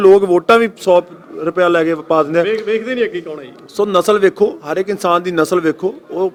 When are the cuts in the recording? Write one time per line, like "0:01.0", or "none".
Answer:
none